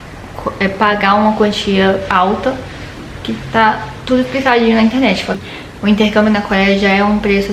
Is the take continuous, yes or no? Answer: no